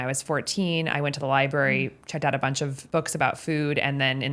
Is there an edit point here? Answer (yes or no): yes